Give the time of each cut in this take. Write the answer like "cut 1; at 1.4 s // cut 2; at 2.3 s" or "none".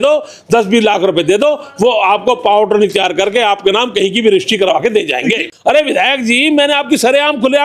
cut 1; at 5.5 s